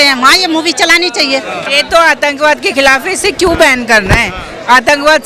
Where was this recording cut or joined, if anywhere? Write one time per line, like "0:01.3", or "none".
0:01.7